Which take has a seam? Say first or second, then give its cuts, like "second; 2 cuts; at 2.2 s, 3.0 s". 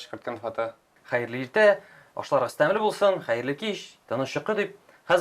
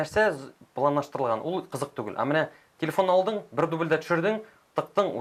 first; 1 cut; at 0.9 s